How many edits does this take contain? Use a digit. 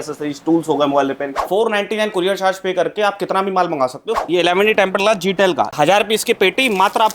3